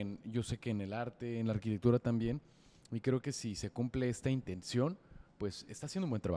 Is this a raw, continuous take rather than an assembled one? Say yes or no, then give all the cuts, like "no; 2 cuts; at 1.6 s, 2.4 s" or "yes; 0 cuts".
yes; 0 cuts